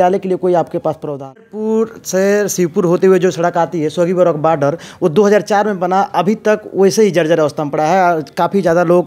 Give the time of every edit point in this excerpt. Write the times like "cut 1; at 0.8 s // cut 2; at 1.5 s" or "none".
cut 1; at 1.5 s